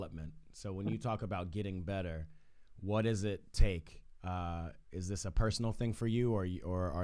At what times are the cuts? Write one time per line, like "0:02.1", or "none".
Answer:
none